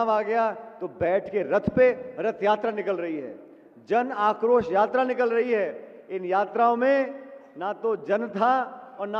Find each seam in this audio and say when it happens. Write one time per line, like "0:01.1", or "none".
none